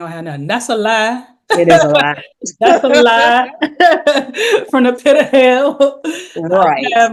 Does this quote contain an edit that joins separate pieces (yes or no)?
no